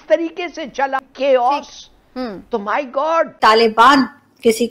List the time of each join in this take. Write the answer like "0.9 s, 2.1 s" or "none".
1.0 s, 3.3 s